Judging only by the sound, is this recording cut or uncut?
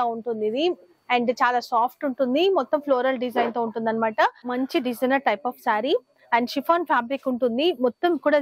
cut